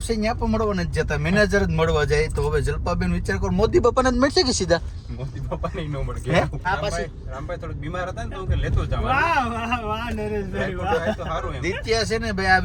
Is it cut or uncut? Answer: cut